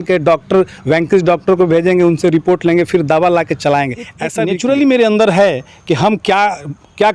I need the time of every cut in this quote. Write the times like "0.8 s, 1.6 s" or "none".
4.3 s